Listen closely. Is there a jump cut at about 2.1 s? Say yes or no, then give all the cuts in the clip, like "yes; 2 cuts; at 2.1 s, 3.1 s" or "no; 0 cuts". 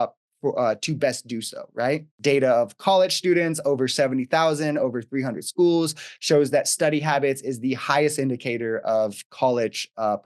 yes; 1 cut; at 2.1 s